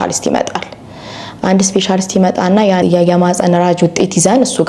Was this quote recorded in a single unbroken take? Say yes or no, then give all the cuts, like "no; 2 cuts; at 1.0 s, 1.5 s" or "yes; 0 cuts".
yes; 0 cuts